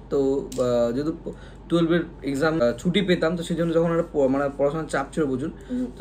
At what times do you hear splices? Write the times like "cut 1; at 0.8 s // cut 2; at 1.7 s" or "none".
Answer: cut 1; at 2.6 s